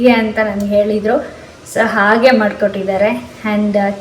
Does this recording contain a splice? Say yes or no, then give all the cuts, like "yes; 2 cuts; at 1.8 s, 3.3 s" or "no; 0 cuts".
no; 0 cuts